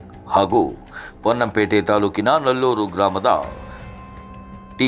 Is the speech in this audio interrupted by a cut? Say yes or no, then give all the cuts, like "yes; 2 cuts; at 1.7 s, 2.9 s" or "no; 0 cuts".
no; 0 cuts